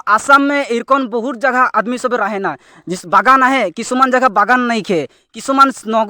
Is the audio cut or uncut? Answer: uncut